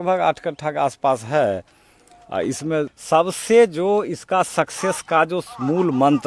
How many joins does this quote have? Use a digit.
1